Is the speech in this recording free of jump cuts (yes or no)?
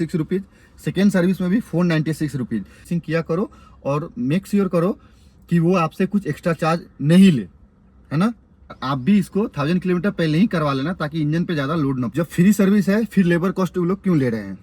no